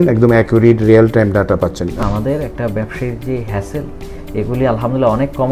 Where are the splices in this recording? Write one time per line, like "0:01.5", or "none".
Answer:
0:02.0